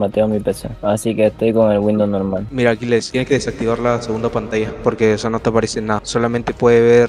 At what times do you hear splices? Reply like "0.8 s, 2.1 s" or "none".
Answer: 2.4 s